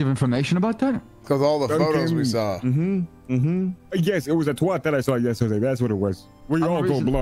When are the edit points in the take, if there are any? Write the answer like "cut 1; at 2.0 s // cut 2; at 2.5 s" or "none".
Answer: cut 1; at 1.1 s // cut 2; at 3.8 s // cut 3; at 6.3 s